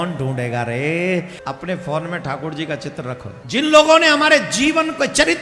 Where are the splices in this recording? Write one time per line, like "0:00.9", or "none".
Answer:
0:01.3
0:03.3